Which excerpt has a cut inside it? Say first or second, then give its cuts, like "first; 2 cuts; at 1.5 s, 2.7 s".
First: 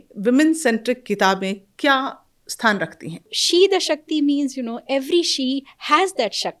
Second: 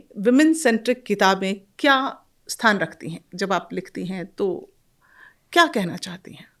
first; 1 cut; at 3.3 s